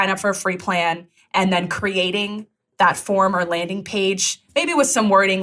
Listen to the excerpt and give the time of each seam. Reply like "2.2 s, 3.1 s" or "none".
none

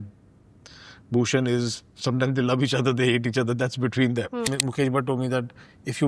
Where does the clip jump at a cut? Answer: 4.5 s

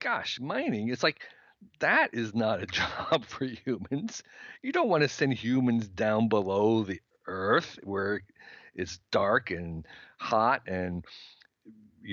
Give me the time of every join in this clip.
none

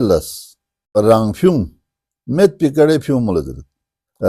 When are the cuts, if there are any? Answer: 0.9 s

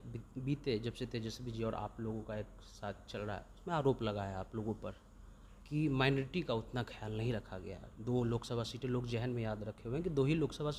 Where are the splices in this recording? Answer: none

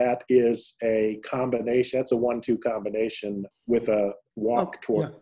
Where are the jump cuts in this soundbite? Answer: none

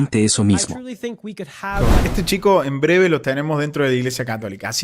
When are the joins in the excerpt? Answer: 1.9 s

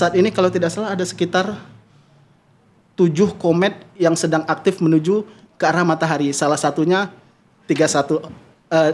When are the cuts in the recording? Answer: none

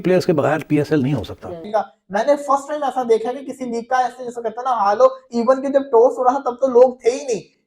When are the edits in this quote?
1.6 s

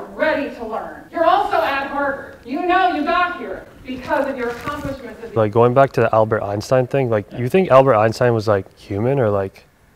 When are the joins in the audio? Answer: 1.0 s, 2.3 s, 5.3 s

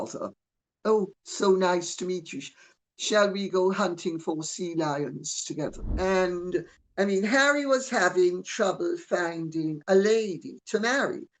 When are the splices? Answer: 5.8 s

